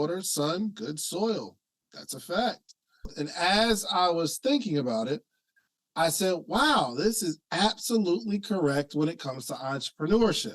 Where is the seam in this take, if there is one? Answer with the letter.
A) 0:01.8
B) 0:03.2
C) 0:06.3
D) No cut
B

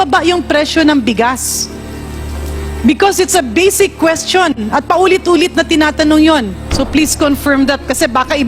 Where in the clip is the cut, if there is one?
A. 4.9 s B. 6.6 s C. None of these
B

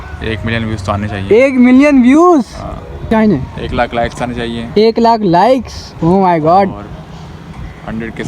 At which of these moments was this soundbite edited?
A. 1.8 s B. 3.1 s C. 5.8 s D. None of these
B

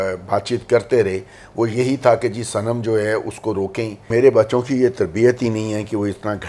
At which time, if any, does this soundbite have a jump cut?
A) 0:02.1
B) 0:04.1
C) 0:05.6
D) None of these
B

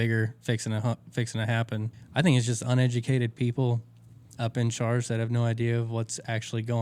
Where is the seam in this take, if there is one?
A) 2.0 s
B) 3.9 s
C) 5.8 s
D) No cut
A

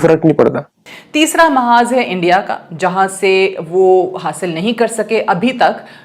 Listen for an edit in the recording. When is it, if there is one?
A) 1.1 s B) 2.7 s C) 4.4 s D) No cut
A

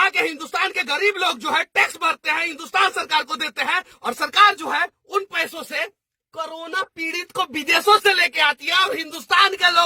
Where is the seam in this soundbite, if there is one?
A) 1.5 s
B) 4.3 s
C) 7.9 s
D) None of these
D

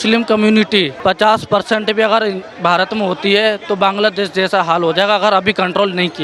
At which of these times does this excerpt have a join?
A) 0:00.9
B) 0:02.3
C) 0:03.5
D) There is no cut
A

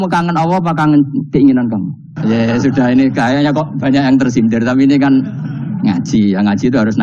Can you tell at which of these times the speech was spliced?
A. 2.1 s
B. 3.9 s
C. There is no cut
A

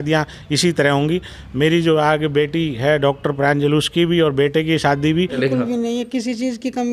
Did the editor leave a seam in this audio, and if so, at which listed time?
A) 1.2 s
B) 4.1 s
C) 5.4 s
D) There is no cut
C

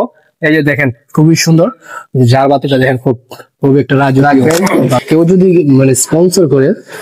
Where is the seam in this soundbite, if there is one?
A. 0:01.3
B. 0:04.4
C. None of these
B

